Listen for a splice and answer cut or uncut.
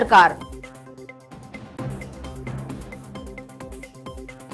uncut